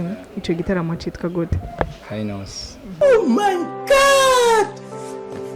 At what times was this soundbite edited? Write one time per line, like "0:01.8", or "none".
0:02.9

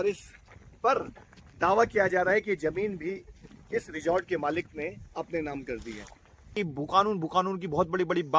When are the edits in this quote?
0:06.5

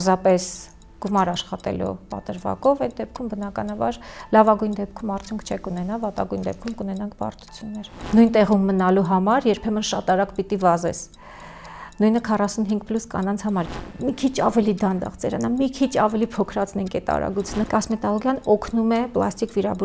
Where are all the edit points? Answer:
0:07.9
0:13.7
0:17.6

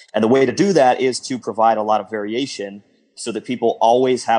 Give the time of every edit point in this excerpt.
0:03.1

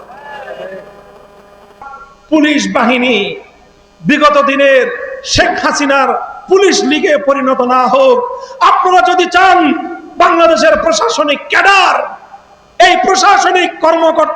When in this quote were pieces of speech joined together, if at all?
0:01.8

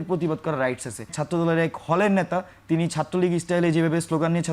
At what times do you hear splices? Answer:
0:01.2

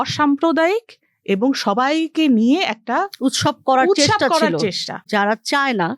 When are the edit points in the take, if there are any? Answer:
0:05.1

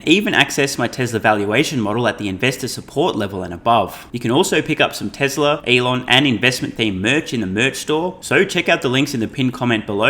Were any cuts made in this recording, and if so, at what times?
0:04.1
0:05.6
0:08.2

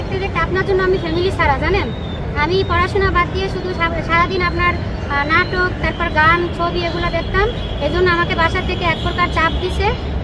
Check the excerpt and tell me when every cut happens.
none

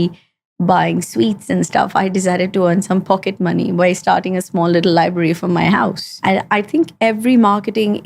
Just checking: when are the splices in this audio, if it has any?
0:06.1

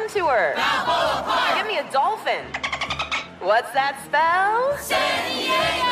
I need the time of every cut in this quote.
none

